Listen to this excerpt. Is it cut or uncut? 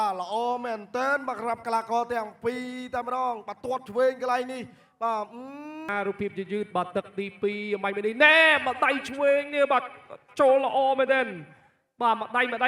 cut